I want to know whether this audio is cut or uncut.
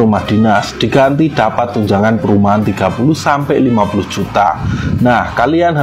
uncut